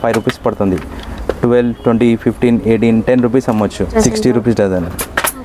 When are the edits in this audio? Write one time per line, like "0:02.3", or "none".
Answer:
0:03.9